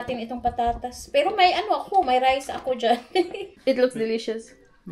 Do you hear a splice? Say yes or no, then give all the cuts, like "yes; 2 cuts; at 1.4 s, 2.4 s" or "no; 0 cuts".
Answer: yes; 1 cut; at 3.4 s